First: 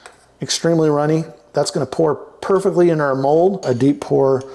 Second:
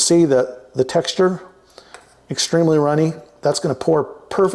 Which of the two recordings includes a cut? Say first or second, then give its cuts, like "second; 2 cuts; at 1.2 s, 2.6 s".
first; 1 cut; at 3.6 s